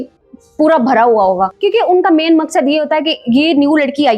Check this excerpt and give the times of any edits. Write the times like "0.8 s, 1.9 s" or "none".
1.5 s